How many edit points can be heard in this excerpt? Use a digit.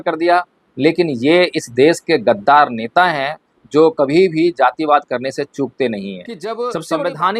1